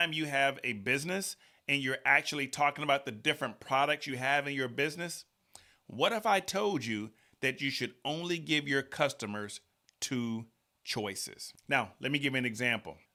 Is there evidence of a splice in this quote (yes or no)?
no